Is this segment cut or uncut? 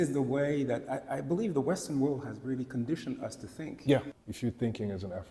cut